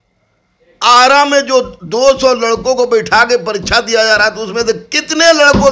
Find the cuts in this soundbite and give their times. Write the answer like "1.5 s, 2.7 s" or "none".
none

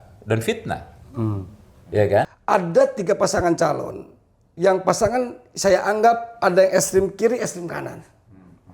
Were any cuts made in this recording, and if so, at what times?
2.4 s

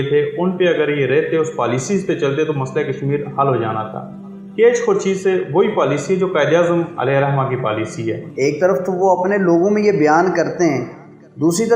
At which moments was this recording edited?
8.3 s

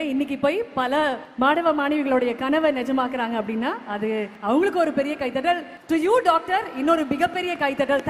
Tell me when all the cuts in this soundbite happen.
1.2 s, 4.3 s, 5.7 s

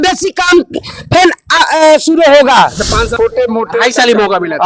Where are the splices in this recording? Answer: 3.1 s

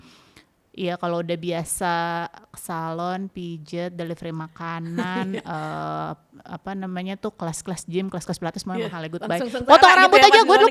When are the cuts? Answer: none

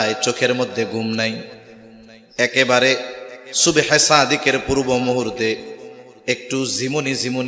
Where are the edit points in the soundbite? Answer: none

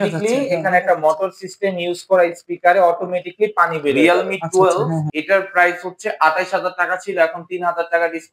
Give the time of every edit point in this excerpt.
4.0 s

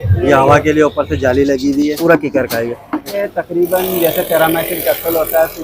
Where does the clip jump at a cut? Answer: 2.0 s, 3.2 s

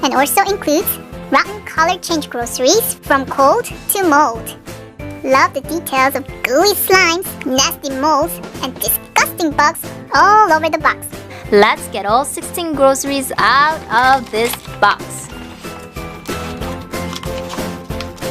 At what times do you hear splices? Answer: 8.9 s

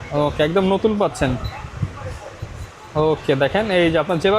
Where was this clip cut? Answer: none

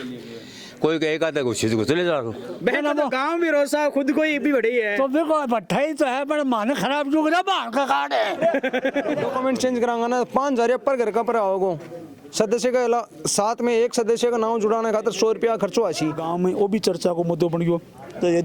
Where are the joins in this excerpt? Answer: 2.5 s, 9.3 s, 16.2 s

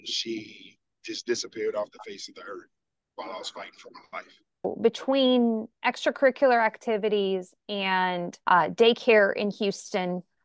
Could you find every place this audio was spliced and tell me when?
4.7 s, 8.3 s

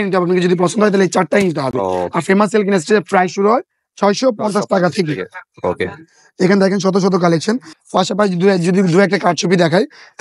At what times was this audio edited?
none

